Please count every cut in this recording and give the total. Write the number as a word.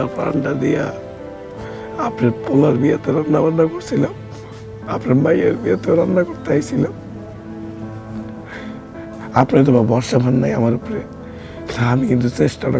zero